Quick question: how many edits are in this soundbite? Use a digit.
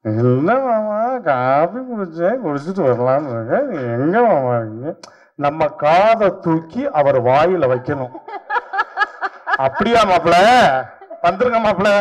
0